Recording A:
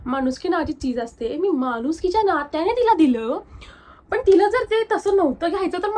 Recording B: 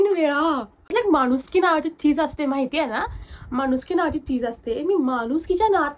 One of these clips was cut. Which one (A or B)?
B